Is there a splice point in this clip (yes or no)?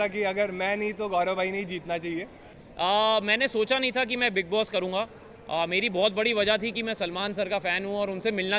yes